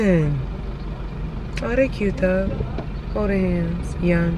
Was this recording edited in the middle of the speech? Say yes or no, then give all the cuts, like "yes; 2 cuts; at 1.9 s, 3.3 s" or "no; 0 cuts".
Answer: no; 0 cuts